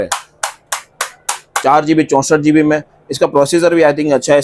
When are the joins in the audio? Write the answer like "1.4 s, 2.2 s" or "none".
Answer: none